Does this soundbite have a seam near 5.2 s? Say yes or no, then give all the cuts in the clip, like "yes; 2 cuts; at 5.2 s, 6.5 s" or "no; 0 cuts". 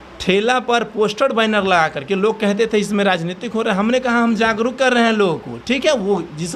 no; 0 cuts